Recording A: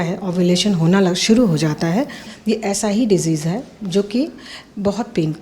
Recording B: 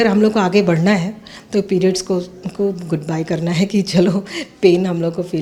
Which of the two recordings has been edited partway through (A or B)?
A